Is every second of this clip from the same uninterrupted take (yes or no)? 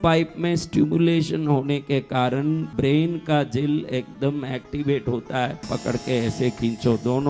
no